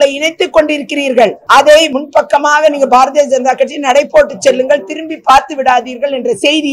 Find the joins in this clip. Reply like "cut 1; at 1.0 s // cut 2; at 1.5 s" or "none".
cut 1; at 1.4 s // cut 2; at 1.9 s